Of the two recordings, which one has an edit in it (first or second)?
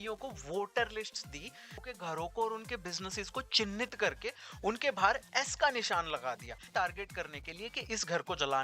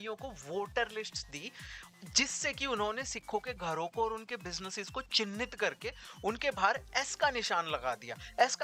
first